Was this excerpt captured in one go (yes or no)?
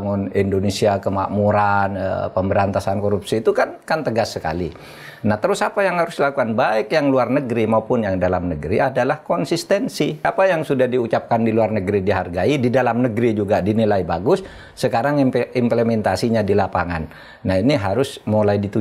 no